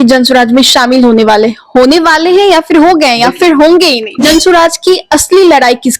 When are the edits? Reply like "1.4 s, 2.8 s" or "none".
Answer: 4.1 s